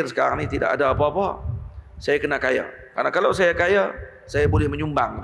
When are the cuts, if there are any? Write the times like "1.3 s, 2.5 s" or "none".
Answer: none